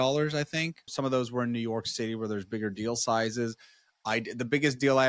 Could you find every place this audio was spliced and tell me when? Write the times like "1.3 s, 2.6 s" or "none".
0.9 s